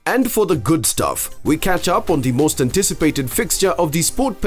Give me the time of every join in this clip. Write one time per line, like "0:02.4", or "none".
0:01.3